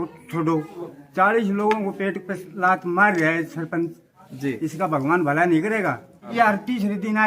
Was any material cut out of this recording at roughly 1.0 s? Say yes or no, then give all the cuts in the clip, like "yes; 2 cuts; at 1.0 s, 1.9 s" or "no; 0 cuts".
yes; 2 cuts; at 1.0 s, 6.3 s